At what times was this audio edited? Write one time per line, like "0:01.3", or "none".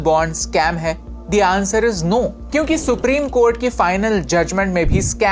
none